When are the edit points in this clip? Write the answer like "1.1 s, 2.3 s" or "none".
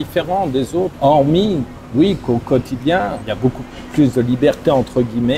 0.9 s, 3.2 s